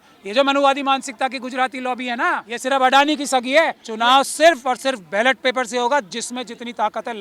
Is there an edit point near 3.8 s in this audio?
yes; 2 cuts; at 2.5 s, 3.8 s

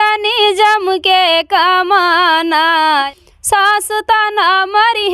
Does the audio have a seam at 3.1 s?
yes; 1 cut; at 3.1 s

